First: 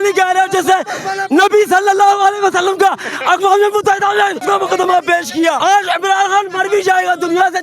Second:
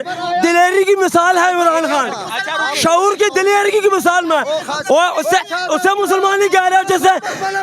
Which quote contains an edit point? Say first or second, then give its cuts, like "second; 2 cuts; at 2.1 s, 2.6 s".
first; 2 cuts; at 4.4 s, 5.6 s